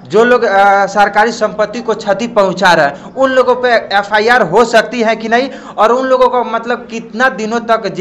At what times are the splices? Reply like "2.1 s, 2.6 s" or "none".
none